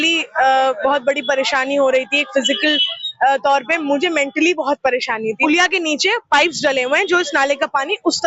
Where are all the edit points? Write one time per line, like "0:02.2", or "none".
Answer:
0:05.4